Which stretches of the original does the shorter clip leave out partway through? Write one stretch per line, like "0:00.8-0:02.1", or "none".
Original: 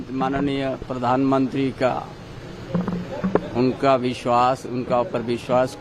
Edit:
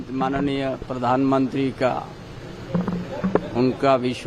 none